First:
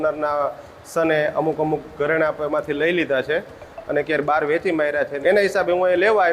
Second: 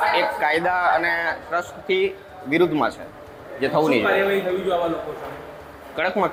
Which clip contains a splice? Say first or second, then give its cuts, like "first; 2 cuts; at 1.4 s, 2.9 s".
first; 1 cut; at 5.1 s